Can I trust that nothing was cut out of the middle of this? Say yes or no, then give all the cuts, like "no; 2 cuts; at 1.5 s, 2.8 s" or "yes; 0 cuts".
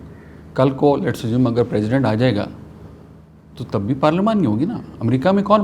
yes; 0 cuts